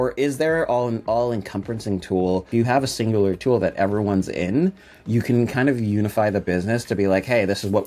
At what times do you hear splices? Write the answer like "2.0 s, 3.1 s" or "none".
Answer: 2.5 s